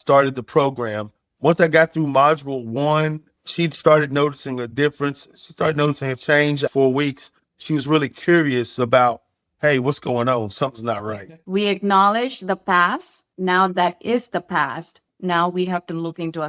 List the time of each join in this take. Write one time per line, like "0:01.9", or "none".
0:03.3
0:06.6
0:11.4